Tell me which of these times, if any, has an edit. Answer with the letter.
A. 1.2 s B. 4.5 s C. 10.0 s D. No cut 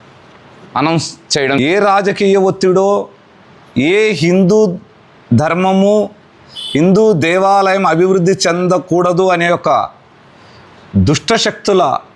A